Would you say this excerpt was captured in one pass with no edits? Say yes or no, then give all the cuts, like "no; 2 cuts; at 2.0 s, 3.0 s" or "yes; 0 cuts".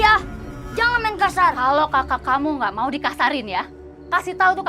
yes; 0 cuts